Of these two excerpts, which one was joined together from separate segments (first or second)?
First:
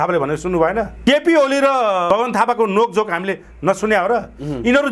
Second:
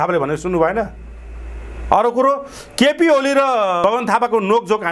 first